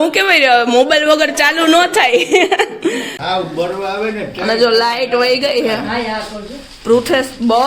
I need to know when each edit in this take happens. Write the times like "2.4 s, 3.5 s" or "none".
3.2 s